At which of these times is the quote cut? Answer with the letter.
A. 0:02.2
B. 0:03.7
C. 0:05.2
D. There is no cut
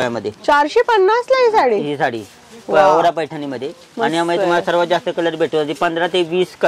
D